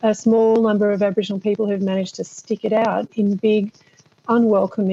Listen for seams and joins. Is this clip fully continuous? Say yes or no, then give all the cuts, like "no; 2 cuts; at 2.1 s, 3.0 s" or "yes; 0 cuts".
yes; 0 cuts